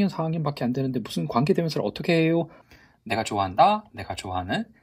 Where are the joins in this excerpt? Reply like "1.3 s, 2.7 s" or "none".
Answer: 2.6 s